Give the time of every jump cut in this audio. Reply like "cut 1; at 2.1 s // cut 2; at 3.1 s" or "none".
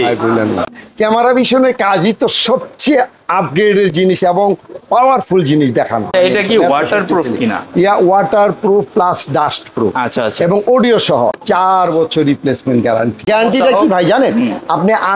cut 1; at 6.1 s // cut 2; at 11.4 s // cut 3; at 13.2 s

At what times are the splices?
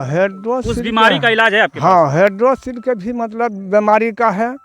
none

